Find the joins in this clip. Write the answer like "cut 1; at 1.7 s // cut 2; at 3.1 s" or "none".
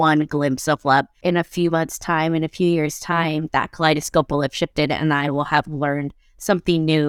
cut 1; at 1.1 s